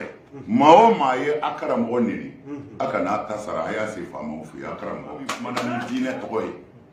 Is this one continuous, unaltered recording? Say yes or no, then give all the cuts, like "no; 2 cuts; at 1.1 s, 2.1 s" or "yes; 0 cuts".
no; 1 cut; at 5.4 s